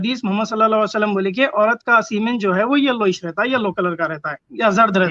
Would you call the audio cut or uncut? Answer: uncut